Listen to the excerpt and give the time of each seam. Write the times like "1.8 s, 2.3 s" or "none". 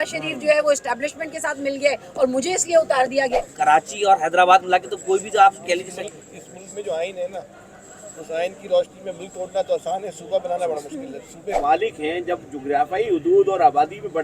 3.3 s, 11.4 s